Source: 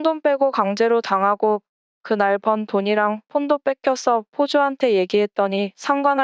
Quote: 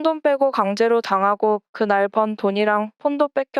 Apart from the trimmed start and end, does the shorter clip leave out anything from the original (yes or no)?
yes